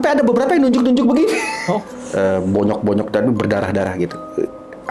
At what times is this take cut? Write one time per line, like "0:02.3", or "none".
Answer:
0:02.0